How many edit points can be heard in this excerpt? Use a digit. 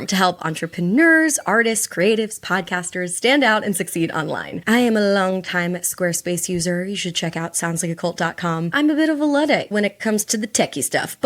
2